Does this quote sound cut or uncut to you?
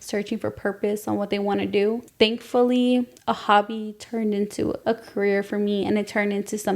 cut